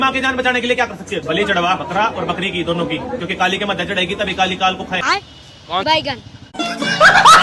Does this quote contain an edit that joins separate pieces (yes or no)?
no